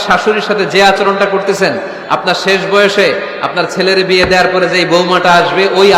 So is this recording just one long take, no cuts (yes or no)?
yes